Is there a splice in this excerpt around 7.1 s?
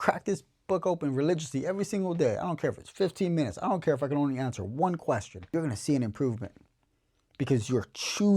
no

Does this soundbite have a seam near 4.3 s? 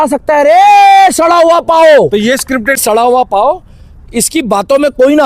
no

